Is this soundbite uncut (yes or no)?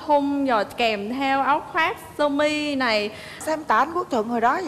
no